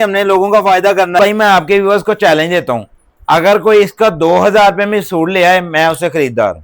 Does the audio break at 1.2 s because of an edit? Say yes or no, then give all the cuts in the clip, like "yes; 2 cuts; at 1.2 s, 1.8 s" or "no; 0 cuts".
yes; 1 cut; at 1.2 s